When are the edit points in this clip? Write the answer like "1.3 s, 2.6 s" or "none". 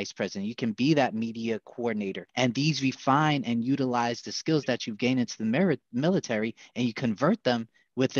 2.2 s